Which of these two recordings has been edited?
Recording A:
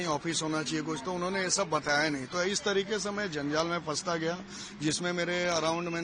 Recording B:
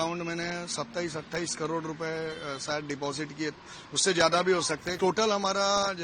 B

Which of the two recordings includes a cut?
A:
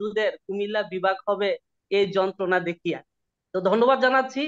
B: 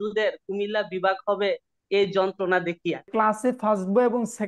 B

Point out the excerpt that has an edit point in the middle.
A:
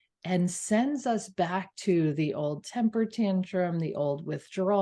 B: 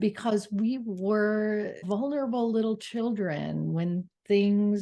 B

